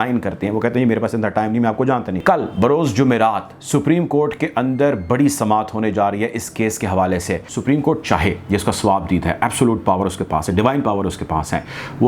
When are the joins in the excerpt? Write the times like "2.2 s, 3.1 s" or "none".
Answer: 2.2 s, 7.5 s